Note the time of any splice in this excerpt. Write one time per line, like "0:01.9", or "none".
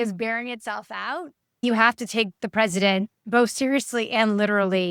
0:01.6